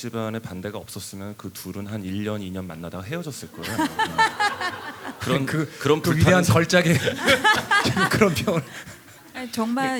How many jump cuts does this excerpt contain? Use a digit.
0